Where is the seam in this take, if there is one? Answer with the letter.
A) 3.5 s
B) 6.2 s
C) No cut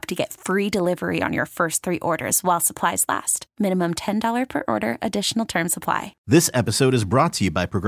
B